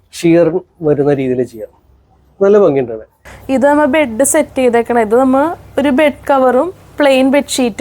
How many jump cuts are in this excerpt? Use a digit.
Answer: 1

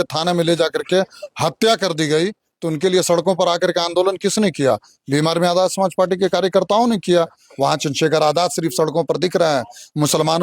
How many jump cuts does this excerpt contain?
1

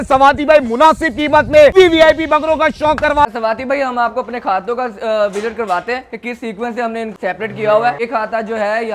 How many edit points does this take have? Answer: 4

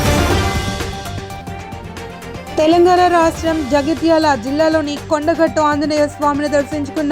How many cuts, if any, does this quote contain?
1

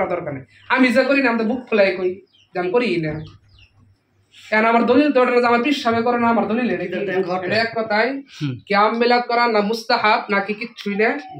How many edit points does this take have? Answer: 1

